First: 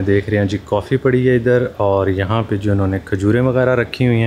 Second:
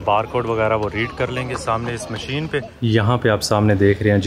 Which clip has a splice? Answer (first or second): second